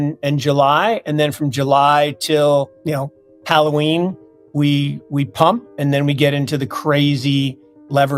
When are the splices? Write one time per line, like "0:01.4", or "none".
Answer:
0:02.8